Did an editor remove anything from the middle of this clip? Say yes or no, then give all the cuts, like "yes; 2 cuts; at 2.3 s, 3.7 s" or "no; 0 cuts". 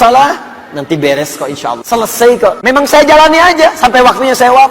yes; 2 cuts; at 1.8 s, 2.6 s